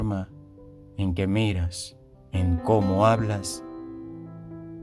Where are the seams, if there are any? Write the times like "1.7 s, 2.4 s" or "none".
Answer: 3.5 s